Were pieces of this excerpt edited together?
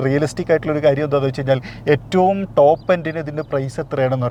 no; 0 cuts

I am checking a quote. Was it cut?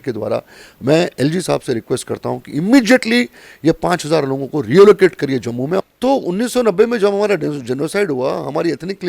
yes; 1 cut; at 5.8 s

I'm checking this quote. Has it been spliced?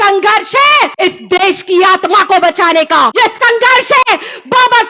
yes; 2 cuts; at 0.9 s, 3.1 s

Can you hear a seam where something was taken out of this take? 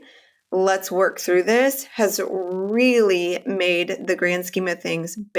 no; 0 cuts

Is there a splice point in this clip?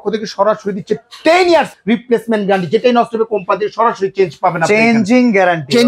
yes; 1 cut; at 1.8 s

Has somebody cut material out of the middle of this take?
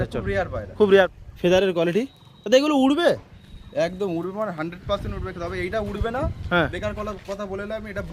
yes; 1 cut; at 1.1 s

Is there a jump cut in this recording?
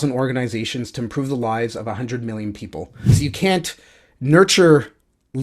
yes; 1 cut; at 3.2 s

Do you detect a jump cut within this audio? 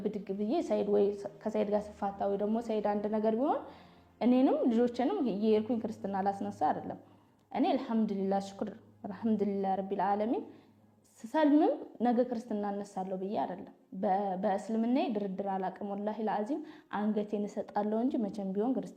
no; 0 cuts

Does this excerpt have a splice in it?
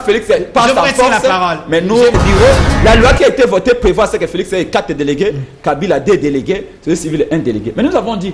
yes; 1 cut; at 2.2 s

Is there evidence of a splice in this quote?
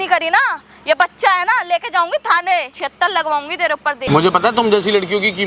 yes; 2 cuts; at 2.8 s, 4.0 s

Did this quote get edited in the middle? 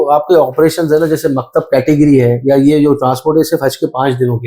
no; 0 cuts

